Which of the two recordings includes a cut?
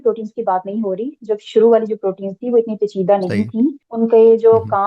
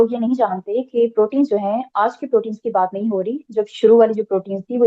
first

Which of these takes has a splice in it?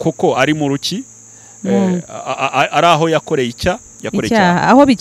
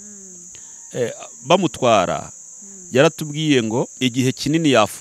second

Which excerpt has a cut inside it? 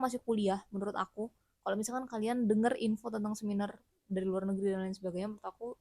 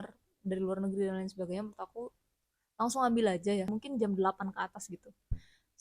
second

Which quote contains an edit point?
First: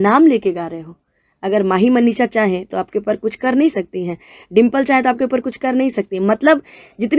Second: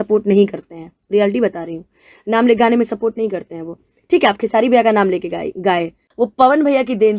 second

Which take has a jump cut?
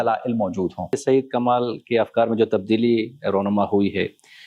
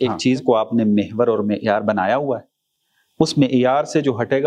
first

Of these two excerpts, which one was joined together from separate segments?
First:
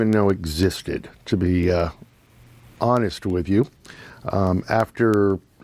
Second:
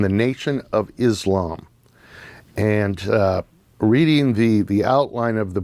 first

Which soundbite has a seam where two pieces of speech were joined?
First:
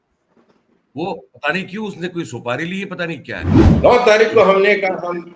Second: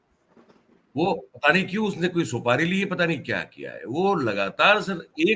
first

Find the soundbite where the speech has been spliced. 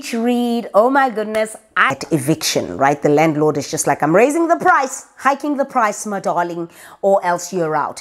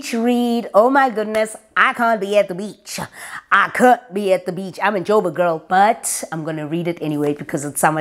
first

